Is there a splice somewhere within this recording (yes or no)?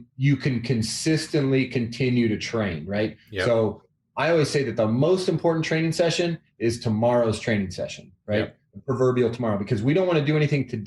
no